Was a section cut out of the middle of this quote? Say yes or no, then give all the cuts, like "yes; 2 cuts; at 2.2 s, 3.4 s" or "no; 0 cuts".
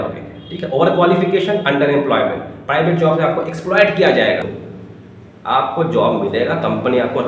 yes; 1 cut; at 4.6 s